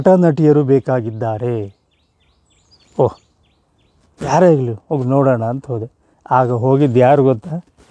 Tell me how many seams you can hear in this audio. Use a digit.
0